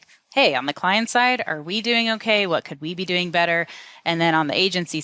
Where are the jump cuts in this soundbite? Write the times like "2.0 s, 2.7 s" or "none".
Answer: none